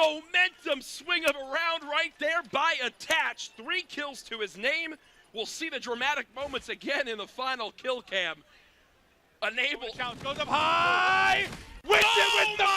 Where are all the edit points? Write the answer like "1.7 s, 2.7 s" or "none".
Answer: 10.1 s